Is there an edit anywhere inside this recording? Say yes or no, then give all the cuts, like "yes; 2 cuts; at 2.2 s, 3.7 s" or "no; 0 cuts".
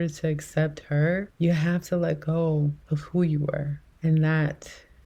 no; 0 cuts